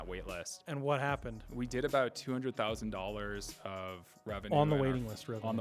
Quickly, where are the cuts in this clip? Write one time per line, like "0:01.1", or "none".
0:01.0
0:04.5